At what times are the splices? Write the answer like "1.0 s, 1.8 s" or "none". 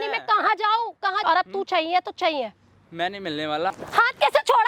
1.2 s, 3.7 s